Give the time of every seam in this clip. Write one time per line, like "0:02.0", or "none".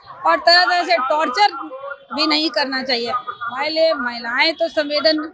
none

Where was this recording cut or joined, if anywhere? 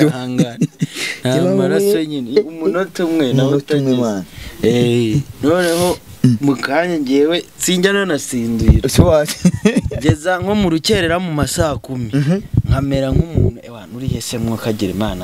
none

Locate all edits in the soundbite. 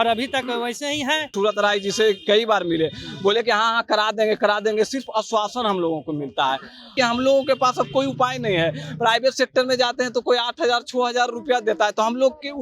0:01.3
0:06.9

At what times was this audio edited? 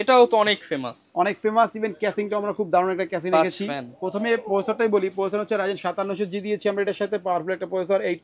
none

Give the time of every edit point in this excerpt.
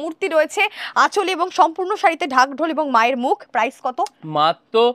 none

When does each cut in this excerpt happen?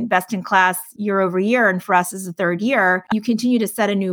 0:00.9
0:03.0

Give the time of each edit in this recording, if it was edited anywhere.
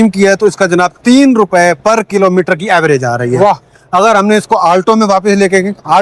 none

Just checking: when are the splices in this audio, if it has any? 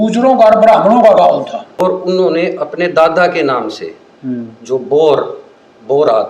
0:01.8

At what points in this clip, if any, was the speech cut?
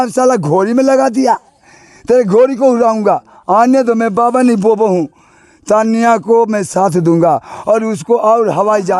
none

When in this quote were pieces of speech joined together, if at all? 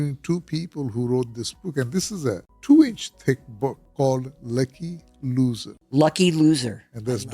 0:02.5
0:03.8
0:05.7

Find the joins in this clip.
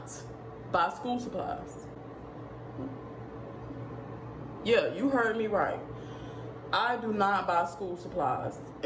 none

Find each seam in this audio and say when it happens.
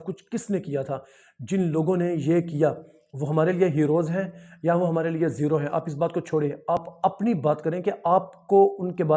none

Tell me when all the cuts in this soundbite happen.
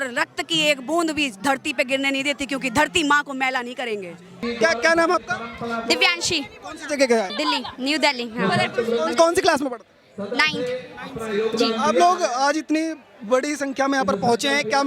none

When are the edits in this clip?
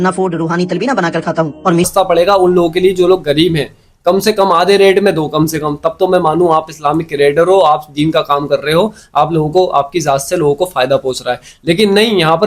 0:01.9

